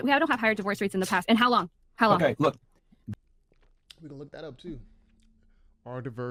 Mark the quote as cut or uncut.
uncut